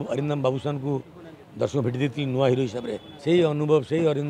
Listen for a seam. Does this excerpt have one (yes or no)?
yes